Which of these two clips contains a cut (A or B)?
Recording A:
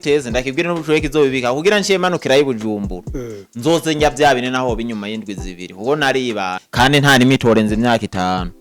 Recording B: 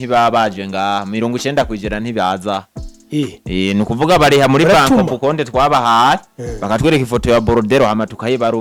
A